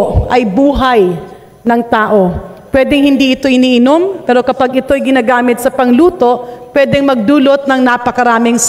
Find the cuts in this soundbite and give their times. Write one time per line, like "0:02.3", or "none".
none